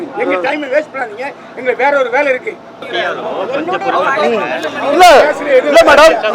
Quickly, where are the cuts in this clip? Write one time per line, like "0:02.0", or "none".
0:02.9